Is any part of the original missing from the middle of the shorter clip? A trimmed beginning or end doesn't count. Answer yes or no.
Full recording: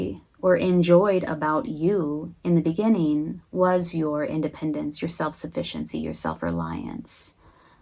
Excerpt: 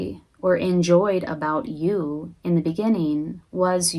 no